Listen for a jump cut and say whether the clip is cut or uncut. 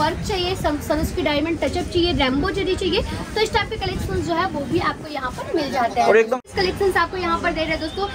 cut